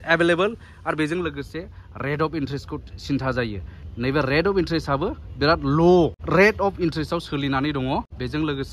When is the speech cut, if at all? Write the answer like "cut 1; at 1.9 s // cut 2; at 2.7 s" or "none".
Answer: none